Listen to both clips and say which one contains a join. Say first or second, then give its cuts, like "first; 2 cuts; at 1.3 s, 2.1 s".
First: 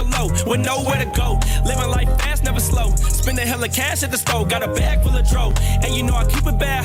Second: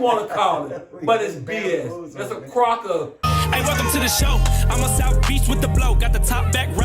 second; 1 cut; at 3.2 s